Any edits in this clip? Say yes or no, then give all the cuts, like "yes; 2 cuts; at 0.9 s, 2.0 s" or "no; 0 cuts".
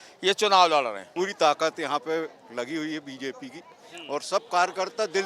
yes; 1 cut; at 1.1 s